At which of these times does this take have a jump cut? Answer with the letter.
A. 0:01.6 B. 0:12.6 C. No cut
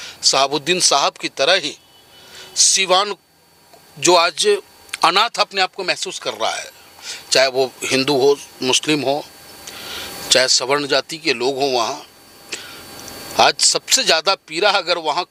C